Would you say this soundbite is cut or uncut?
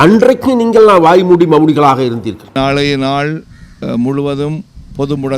cut